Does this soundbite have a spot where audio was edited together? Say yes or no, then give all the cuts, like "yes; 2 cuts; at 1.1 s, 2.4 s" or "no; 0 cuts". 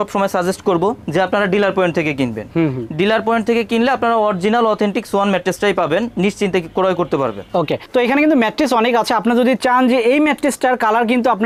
no; 0 cuts